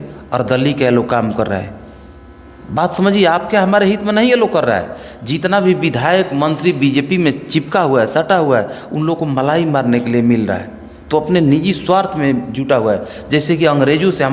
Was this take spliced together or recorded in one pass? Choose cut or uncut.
uncut